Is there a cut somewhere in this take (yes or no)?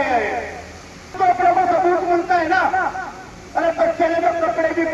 yes